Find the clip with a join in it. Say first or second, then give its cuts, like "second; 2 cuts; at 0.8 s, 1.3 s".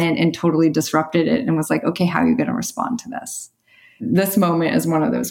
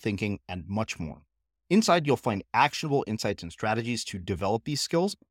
first; 1 cut; at 4.0 s